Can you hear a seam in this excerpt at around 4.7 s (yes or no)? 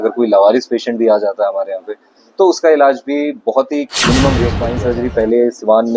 yes